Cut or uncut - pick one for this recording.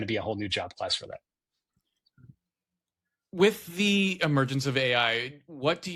cut